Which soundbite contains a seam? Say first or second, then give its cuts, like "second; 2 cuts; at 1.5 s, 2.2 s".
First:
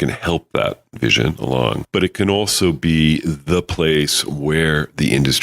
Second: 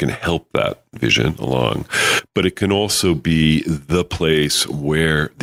first; 1 cut; at 1.8 s